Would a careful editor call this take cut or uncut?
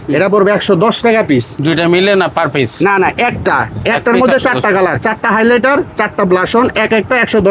uncut